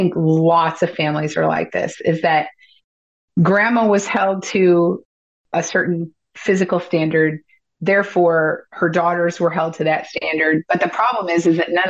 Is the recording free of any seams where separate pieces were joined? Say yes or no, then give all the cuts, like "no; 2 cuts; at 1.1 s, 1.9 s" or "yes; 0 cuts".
yes; 0 cuts